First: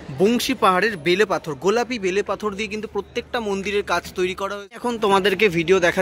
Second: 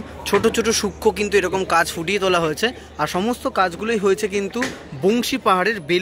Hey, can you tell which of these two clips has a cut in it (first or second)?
first